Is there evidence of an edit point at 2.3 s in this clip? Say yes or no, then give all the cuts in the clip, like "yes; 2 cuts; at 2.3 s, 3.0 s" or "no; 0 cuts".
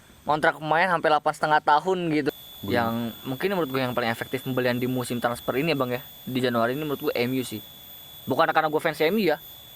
yes; 1 cut; at 2.3 s